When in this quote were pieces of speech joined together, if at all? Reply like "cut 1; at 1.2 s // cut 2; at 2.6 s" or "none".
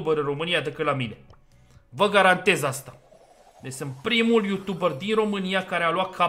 none